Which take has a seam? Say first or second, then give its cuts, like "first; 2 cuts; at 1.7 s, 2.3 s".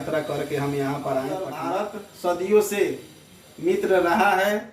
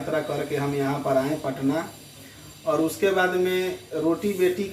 first; 1 cut; at 1.6 s